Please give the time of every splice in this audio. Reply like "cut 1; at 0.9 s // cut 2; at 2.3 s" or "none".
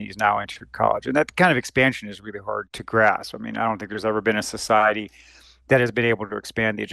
cut 1; at 2.7 s